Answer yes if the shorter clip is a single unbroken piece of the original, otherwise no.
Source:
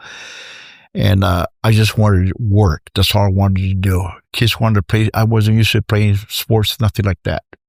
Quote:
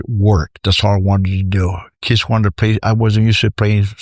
yes